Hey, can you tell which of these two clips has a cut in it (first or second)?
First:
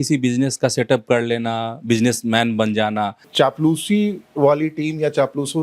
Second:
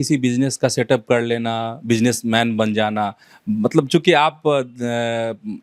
first